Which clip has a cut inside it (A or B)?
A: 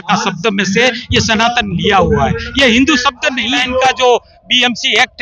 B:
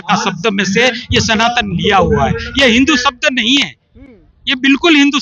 A